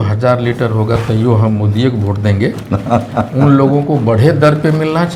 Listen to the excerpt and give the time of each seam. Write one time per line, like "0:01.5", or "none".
none

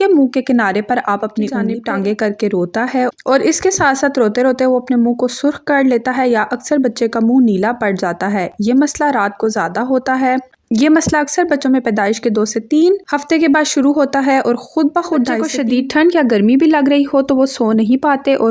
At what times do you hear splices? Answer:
0:01.7
0:15.5

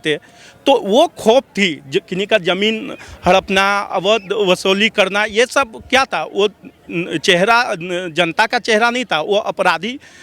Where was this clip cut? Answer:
none

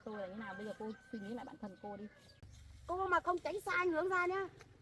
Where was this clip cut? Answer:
0:02.3

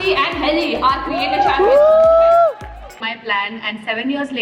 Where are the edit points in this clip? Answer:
0:03.0

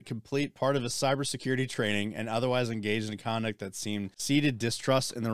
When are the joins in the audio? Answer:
0:04.1

